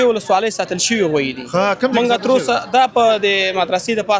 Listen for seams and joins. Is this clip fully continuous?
yes; 0 cuts

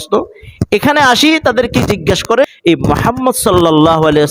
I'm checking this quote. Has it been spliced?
yes; 1 cut; at 2.5 s

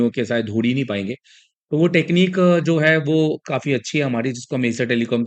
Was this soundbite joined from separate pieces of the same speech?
no; 0 cuts

